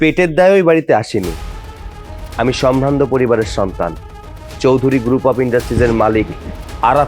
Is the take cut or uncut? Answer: uncut